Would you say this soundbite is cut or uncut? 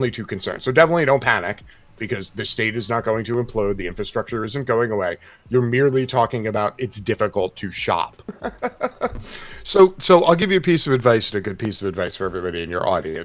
cut